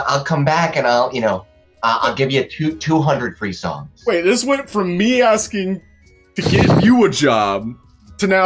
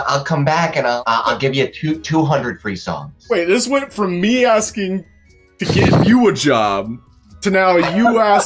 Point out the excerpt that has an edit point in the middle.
second; 1 cut; at 1.0 s

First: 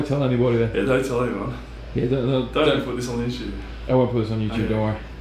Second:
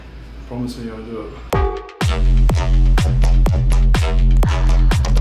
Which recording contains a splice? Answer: second; 1 cut; at 1.3 s

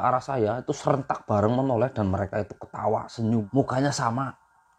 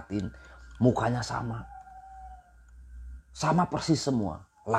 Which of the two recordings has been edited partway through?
first; 1 cut; at 3.5 s

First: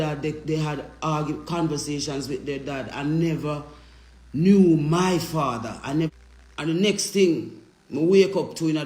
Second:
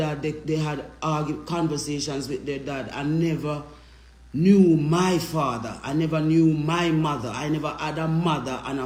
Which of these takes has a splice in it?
first; 1 cut; at 6.1 s

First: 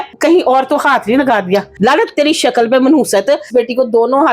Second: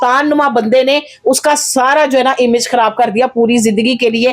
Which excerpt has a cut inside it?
first; 2 cuts; at 1.7 s, 3.5 s

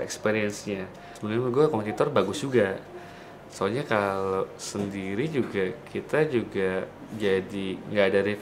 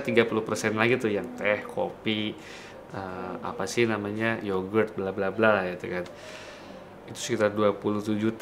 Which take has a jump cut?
first; 1 cut; at 1.2 s

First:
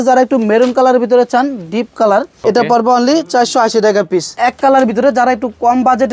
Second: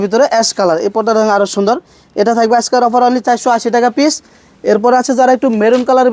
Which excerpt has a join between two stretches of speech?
first; 2 cuts; at 2.3 s, 4.4 s

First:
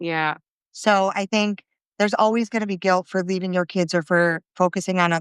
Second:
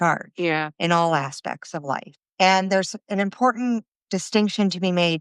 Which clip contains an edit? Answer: second; 1 cut; at 2.2 s

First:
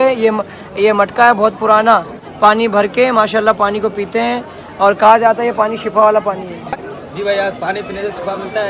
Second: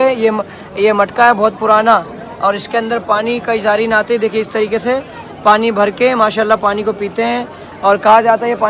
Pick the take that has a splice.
first; 2 cuts; at 2.2 s, 6.8 s

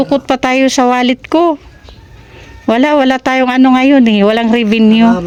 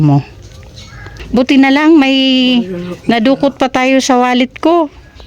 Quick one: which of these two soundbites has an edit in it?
second; 1 cut; at 1.1 s

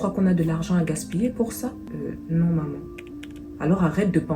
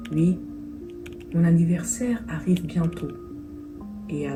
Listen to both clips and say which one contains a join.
first; 1 cut; at 1.8 s

